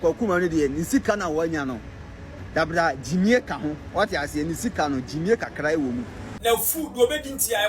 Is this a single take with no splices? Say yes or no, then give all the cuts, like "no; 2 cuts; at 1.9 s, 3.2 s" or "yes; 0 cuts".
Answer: no; 1 cut; at 6.3 s